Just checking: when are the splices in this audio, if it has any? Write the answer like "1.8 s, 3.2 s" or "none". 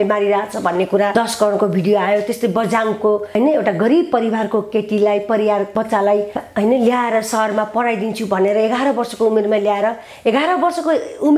1.1 s, 3.4 s, 5.8 s

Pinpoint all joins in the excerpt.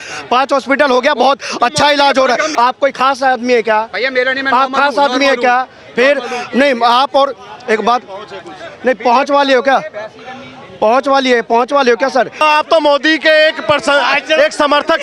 2.5 s, 12.4 s

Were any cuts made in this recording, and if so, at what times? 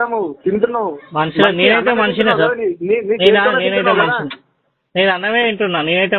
none

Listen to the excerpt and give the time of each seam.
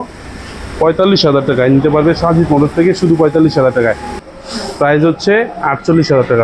4.2 s

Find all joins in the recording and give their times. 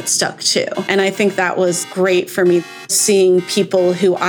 0.9 s, 2.9 s

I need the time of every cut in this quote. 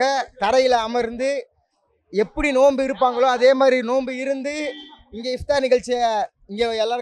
none

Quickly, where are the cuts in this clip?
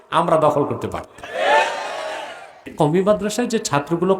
2.7 s

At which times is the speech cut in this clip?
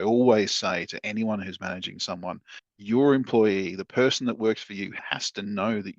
5.0 s

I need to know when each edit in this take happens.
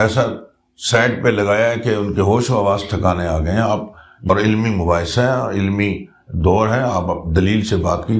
4.3 s

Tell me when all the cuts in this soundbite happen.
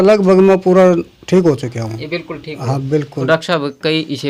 3.3 s

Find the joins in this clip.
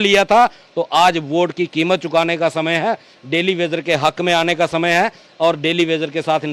none

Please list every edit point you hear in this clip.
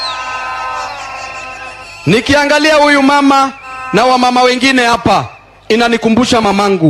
none

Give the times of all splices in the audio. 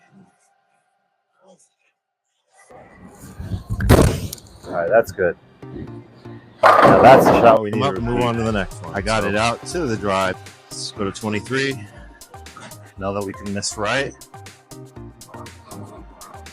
7.8 s, 8.8 s, 10.4 s

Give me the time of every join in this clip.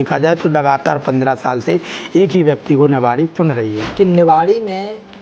3.8 s

